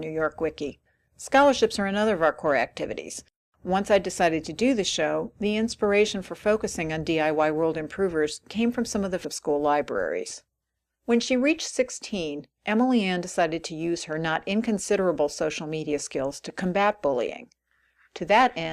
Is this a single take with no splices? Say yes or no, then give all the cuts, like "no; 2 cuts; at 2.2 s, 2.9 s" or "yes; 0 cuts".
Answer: yes; 0 cuts